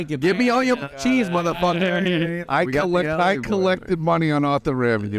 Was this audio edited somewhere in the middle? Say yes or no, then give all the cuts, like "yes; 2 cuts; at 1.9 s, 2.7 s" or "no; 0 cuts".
yes; 1 cut; at 2.4 s